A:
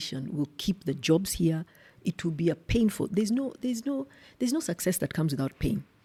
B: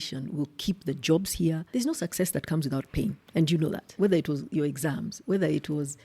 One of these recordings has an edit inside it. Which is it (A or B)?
B